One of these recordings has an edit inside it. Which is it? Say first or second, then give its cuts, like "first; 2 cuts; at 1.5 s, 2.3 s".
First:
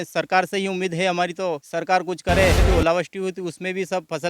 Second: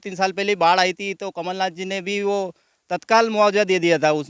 first; 2 cuts; at 1.7 s, 2.7 s